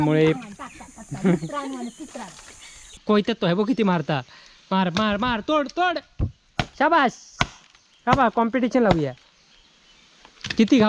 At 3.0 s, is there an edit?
yes; 1 cut; at 3.0 s

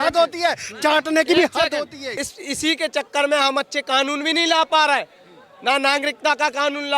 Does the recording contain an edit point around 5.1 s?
no; 1 cut; at 2.3 s

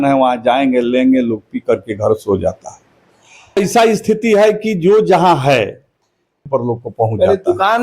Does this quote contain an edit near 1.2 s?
no; 2 cuts; at 3.6 s, 6.5 s

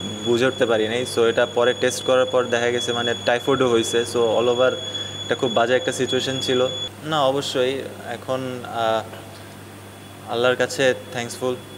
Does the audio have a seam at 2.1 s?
no; 1 cut; at 6.9 s

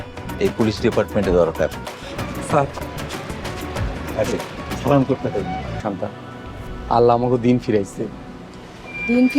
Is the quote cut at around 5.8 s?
yes; 1 cut; at 5.8 s

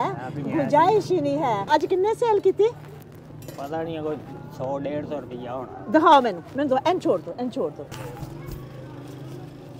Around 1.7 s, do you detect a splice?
yes; 2 cuts; at 1.7 s, 7.9 s

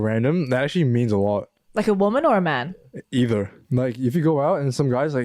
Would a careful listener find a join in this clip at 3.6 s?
yes; 1 cut; at 3.6 s

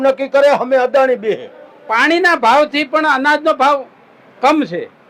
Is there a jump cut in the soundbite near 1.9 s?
yes; 1 cut; at 1.9 s

